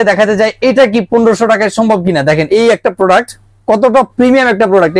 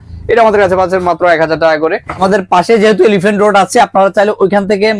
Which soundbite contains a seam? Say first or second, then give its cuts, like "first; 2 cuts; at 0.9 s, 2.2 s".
second; 1 cut; at 2.2 s